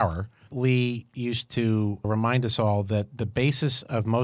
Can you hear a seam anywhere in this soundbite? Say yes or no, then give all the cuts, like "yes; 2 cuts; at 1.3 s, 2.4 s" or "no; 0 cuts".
yes; 1 cut; at 2.1 s